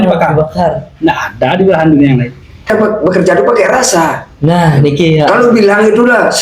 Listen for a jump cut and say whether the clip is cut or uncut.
cut